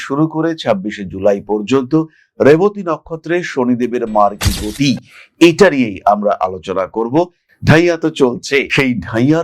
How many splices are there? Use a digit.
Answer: 1